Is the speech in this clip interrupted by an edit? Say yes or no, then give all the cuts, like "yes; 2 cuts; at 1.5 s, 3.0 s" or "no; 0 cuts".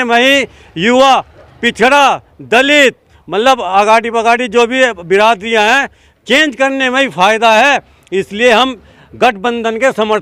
no; 0 cuts